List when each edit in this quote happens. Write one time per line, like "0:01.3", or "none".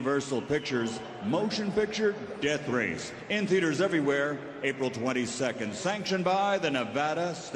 none